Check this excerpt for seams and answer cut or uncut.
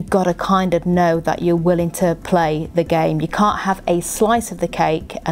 uncut